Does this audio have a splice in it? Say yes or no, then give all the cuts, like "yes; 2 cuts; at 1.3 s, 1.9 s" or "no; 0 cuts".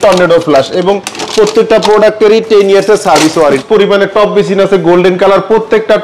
yes; 1 cut; at 3.6 s